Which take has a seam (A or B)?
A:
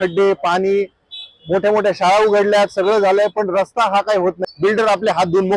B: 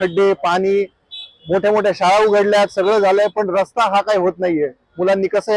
A